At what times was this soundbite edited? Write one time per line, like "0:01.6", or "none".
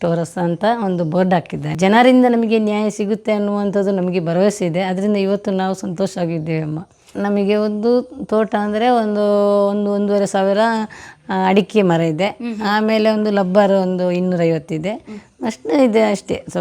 0:01.7
0:07.1